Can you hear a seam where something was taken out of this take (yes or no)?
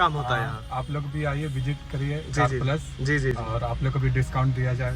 no